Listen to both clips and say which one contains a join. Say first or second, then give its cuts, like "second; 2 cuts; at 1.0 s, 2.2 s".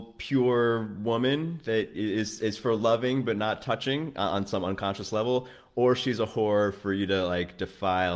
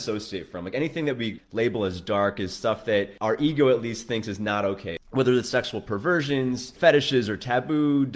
second; 4 cuts; at 1.4 s, 3.1 s, 4.9 s, 6.7 s